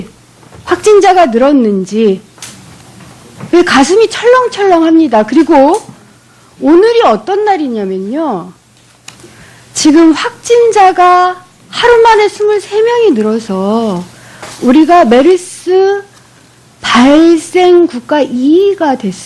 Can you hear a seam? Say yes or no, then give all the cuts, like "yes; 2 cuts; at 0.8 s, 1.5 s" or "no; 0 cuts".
no; 0 cuts